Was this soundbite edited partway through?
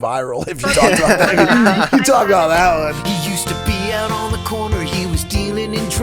yes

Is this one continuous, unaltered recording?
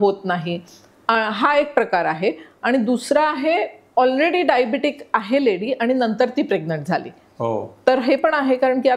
yes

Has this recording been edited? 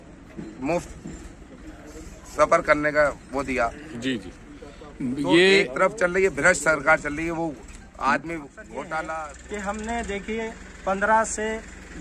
yes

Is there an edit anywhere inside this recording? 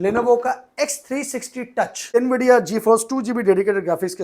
yes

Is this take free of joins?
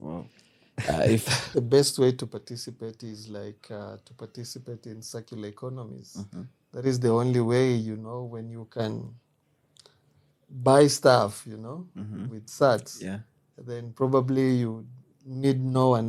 no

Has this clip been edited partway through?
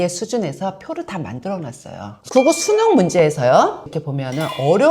yes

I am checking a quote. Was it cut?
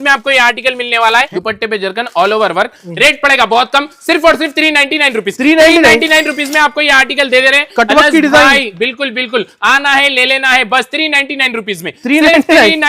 yes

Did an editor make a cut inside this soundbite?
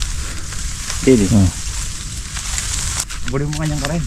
yes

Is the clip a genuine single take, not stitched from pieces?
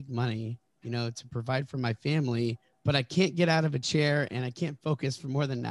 no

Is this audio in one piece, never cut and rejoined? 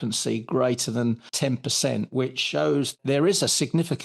no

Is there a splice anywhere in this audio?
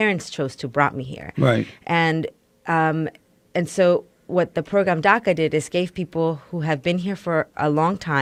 no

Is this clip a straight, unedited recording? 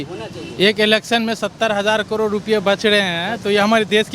yes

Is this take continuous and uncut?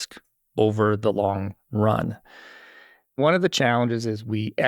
no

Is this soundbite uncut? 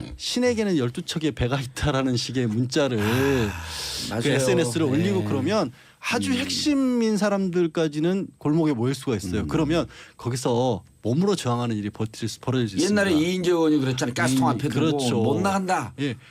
no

